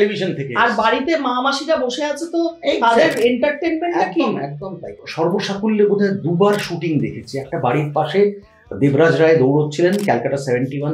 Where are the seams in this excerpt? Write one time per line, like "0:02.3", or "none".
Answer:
0:05.0